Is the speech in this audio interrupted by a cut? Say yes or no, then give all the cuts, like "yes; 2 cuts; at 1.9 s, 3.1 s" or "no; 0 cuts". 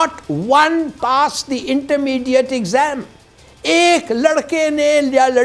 no; 0 cuts